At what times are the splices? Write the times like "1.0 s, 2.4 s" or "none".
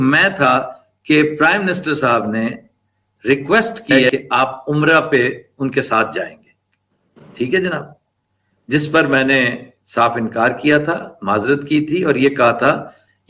4.1 s